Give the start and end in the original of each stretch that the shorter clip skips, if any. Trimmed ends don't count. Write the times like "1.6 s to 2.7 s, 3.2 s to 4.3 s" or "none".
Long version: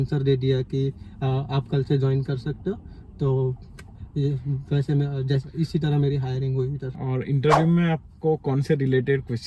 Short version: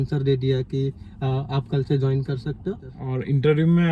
2.9 s to 6.9 s